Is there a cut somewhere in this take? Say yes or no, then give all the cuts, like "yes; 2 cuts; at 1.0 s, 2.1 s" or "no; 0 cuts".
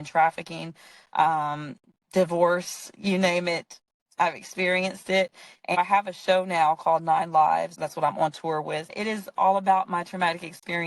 yes; 3 cuts; at 5.8 s, 7.7 s, 8.9 s